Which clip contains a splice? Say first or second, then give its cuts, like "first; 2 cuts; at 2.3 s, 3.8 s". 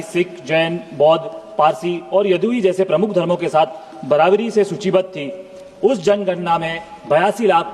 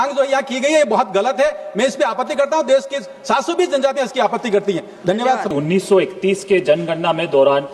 second; 1 cut; at 5.5 s